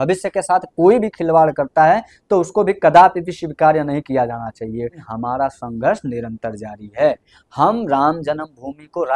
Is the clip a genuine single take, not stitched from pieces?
no; 1 cut; at 5.0 s

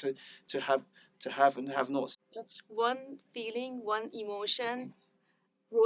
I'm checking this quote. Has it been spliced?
yes; 1 cut; at 2.1 s

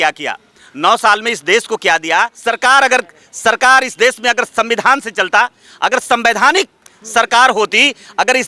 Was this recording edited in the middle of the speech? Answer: yes; 1 cut; at 2.4 s

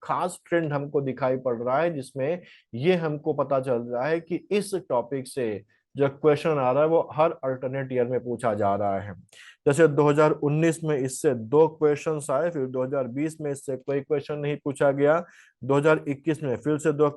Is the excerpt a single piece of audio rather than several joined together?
yes; 0 cuts

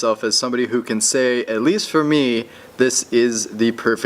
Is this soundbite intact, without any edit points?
no; 1 cut; at 1.2 s

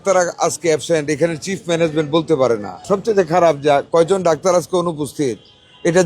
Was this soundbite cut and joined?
yes; 1 cut; at 2.7 s

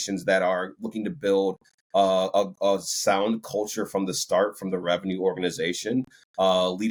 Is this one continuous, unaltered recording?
yes; 0 cuts

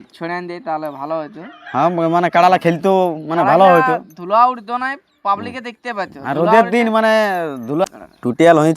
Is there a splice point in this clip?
yes; 1 cut; at 7.8 s

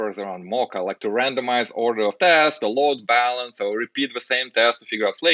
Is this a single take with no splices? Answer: yes; 0 cuts

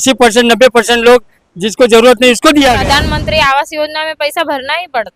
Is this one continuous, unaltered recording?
no; 1 cut; at 2.8 s

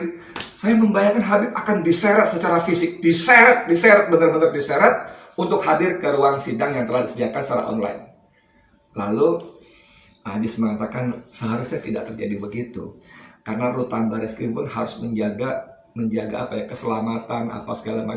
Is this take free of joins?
yes; 0 cuts

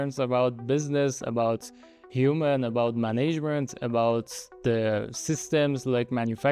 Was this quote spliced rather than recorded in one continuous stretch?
no; 0 cuts

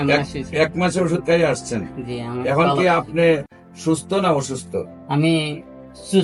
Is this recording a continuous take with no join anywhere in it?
yes; 0 cuts

